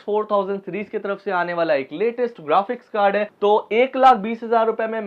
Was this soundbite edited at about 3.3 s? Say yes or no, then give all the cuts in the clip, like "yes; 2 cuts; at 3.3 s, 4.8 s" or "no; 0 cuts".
yes; 1 cut; at 3.3 s